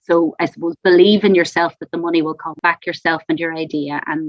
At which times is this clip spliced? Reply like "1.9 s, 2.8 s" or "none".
2.5 s

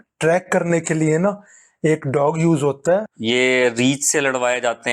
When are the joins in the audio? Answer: 3.1 s

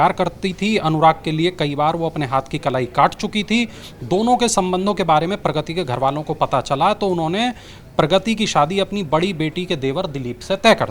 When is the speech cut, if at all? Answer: none

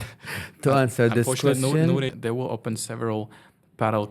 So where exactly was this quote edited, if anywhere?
2.1 s

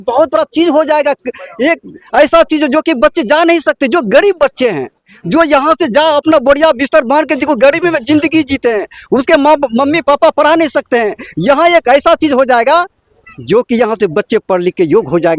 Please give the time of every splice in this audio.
none

